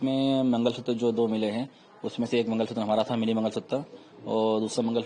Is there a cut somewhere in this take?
no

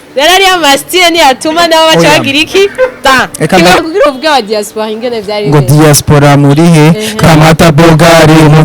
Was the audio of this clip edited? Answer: yes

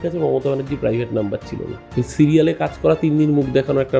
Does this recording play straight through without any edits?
no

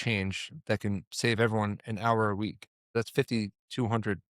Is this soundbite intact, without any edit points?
no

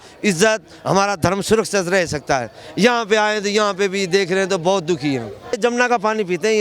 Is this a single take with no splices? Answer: no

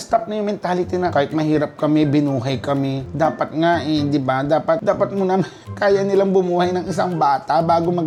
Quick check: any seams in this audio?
no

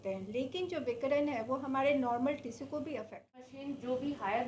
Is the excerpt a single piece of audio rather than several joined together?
no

